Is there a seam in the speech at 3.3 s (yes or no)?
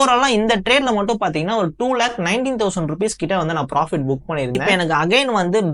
no